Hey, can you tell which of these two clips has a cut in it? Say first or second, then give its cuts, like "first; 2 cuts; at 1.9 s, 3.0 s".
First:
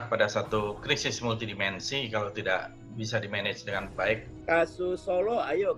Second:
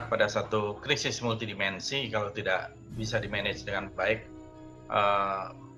first; 1 cut; at 4.3 s